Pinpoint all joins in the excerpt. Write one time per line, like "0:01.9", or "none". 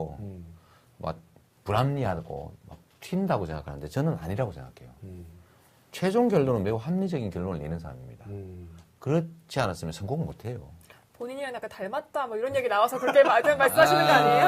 0:09.6